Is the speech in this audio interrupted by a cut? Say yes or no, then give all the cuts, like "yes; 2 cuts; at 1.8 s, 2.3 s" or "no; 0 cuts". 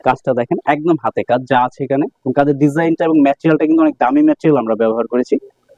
no; 0 cuts